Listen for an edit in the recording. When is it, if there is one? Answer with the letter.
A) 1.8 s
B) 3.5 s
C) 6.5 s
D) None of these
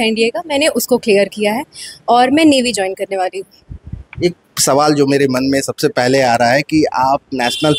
D